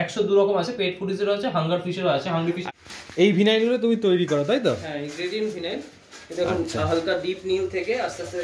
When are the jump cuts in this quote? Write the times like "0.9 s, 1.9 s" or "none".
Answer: 2.6 s

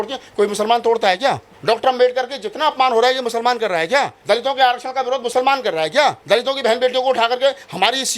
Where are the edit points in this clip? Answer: 1.5 s, 4.2 s, 6.2 s

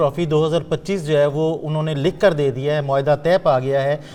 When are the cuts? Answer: none

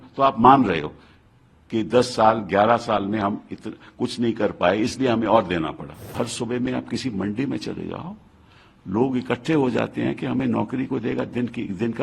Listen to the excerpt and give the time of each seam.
6.1 s

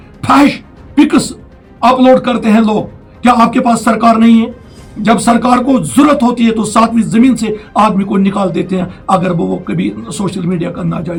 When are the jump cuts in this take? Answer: none

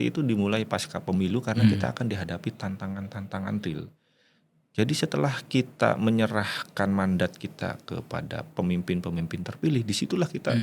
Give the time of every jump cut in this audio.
none

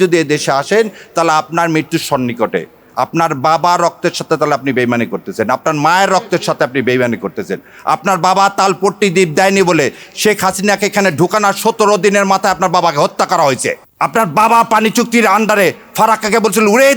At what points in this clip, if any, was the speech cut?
13.9 s

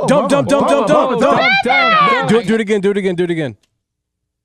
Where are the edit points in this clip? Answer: none

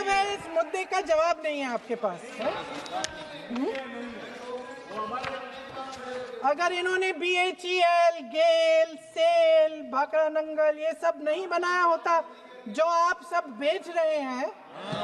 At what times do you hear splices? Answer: none

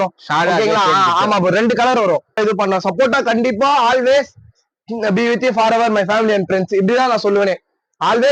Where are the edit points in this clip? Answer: 2.4 s

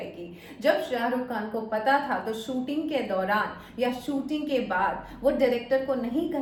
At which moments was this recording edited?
none

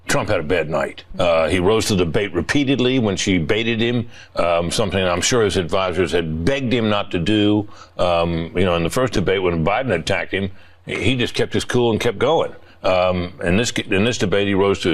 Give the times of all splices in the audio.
1.0 s

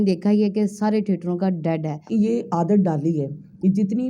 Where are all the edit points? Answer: 2.0 s

